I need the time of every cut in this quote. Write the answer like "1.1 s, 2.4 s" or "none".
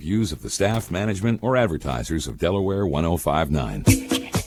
none